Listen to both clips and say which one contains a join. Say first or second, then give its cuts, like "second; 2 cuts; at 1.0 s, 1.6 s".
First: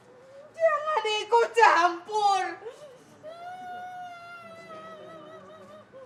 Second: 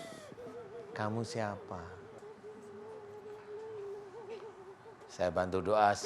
second; 1 cut; at 2.2 s